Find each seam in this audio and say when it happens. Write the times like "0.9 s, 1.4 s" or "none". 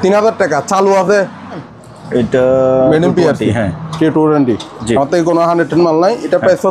1.7 s